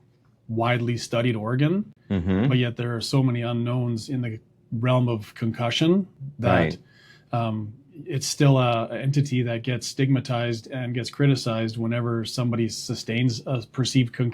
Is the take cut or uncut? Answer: uncut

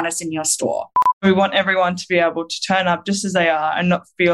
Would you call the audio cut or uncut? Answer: cut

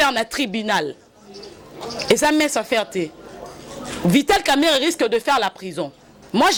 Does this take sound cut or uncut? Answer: uncut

